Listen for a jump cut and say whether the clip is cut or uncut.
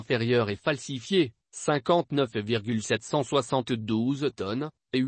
cut